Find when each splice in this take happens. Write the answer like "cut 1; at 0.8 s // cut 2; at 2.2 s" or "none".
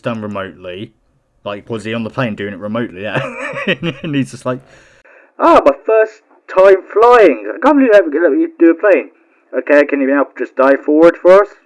cut 1; at 0.9 s